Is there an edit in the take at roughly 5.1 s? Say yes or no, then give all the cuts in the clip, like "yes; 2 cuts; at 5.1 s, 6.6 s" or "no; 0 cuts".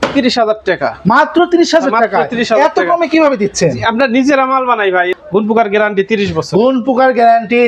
yes; 1 cut; at 5.1 s